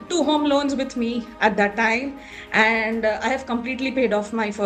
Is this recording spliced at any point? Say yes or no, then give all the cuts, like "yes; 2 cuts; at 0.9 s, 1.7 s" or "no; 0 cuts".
no; 0 cuts